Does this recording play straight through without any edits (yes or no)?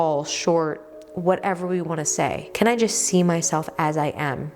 no